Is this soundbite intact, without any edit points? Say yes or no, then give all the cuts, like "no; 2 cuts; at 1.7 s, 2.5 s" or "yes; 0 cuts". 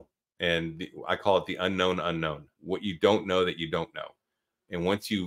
no; 1 cut; at 2.5 s